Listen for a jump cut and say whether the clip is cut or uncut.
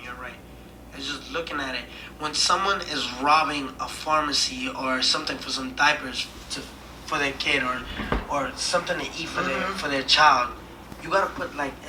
uncut